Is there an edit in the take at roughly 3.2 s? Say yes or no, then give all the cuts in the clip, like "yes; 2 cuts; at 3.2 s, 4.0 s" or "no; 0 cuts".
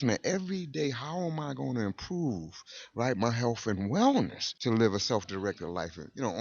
no; 1 cut; at 4.4 s